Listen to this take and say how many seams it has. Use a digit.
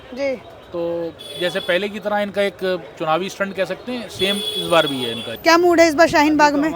1